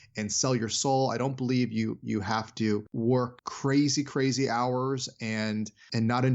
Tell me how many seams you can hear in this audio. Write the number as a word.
one